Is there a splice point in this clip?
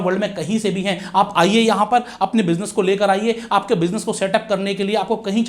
no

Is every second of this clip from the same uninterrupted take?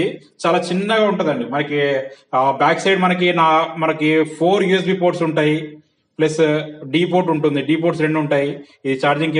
yes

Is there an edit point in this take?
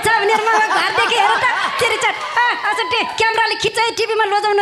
no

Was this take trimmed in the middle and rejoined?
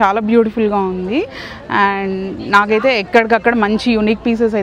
no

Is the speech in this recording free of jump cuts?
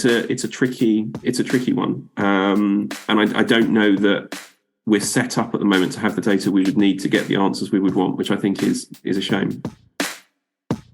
no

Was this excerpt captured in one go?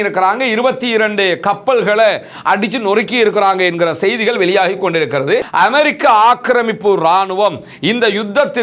no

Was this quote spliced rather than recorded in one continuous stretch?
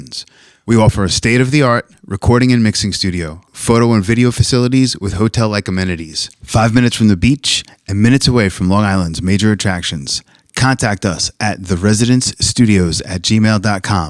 no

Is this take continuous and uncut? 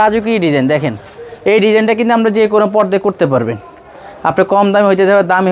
yes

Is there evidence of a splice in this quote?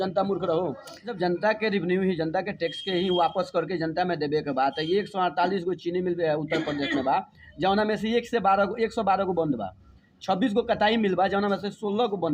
yes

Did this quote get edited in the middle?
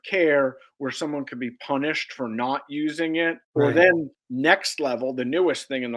yes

